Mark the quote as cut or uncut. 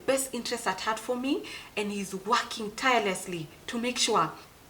uncut